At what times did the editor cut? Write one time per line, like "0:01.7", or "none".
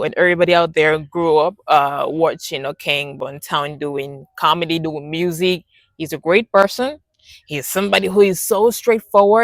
none

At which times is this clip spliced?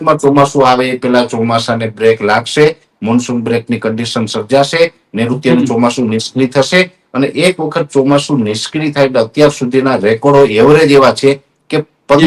none

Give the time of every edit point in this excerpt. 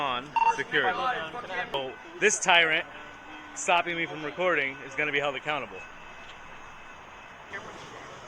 0:01.7
0:07.5

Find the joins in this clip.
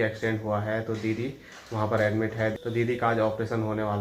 0:02.5

